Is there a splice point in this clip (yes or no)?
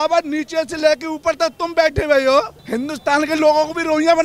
yes